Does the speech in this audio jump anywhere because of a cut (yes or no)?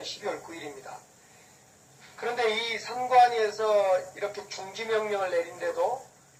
no